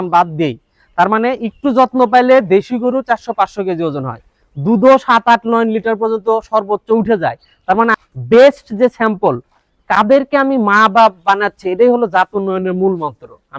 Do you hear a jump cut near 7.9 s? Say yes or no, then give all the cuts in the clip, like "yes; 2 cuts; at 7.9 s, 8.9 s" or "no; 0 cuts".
yes; 1 cut; at 7.9 s